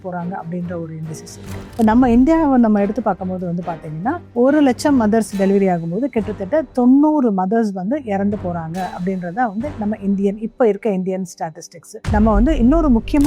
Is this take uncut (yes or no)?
no